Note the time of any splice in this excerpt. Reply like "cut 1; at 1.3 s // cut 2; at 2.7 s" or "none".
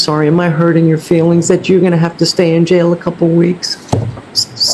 none